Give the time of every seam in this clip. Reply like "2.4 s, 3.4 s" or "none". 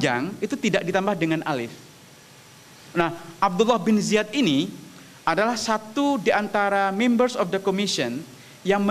none